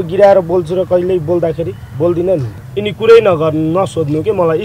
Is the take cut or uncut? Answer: cut